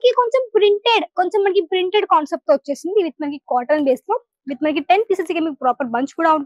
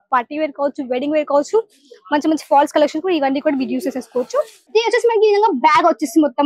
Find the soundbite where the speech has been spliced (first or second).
second